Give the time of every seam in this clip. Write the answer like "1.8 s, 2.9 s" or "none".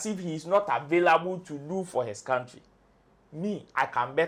none